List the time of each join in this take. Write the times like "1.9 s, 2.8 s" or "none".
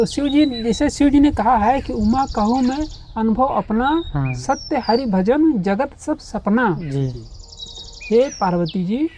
none